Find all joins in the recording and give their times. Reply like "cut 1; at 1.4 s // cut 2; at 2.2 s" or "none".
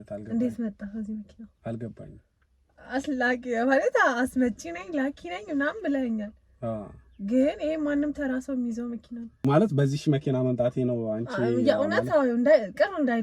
cut 1; at 9.3 s